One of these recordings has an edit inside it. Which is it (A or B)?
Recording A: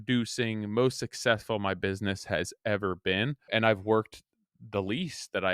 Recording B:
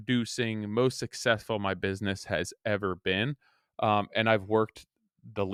A